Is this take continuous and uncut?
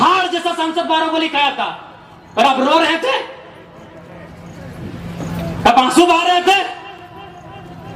yes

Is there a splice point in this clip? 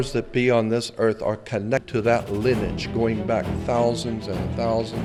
no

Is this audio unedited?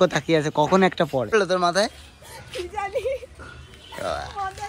no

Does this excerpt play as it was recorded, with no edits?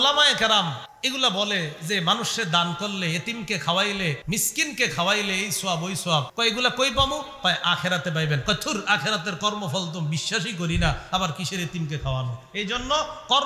no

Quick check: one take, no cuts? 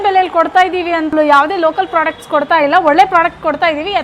no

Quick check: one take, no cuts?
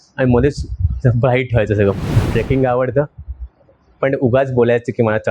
no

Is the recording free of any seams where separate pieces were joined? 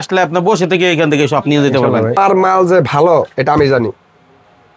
no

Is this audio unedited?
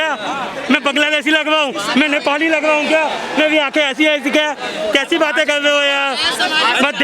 yes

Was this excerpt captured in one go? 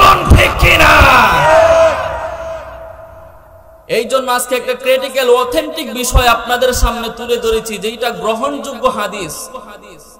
yes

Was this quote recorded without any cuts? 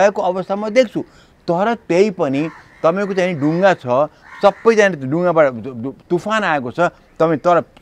yes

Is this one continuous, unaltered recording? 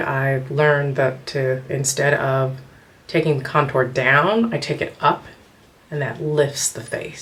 yes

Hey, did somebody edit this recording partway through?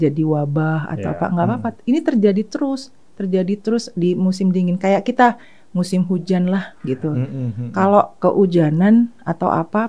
no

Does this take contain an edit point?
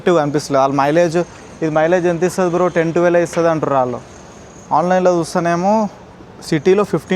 no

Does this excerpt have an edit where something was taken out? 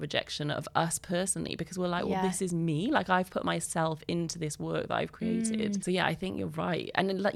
no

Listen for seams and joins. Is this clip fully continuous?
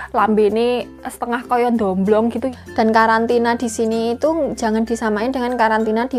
no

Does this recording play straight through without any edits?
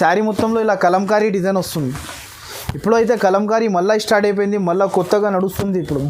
yes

